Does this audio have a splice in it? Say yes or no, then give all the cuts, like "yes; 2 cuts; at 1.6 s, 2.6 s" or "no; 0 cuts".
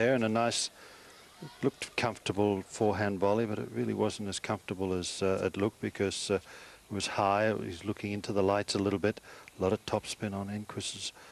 yes; 1 cut; at 5.8 s